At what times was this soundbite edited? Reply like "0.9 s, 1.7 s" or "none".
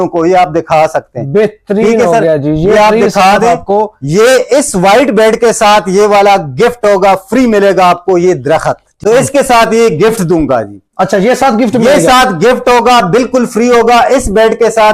8.9 s